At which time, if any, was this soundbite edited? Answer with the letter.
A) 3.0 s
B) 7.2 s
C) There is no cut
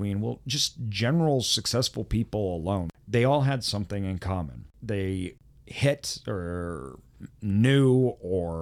A